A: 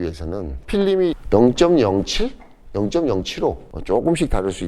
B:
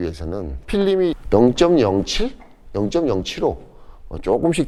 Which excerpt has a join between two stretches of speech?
A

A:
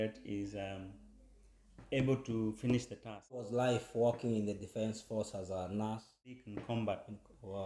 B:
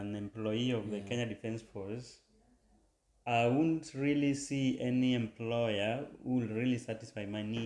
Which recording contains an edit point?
A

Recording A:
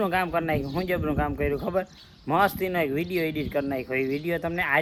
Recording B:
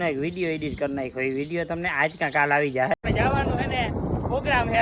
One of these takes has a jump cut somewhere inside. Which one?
B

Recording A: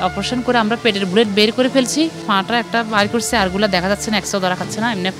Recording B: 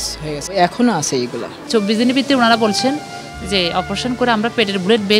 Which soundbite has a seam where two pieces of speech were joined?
B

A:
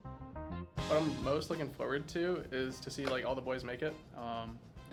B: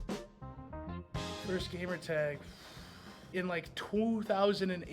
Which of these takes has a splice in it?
B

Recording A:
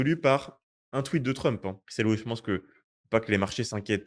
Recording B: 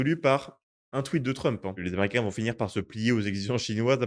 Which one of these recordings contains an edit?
B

